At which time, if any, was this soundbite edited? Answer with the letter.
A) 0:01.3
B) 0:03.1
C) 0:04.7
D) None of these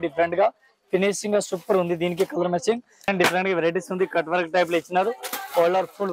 B